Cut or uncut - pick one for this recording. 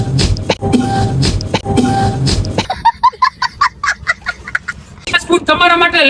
cut